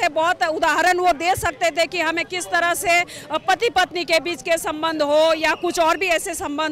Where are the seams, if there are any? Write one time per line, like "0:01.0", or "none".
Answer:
none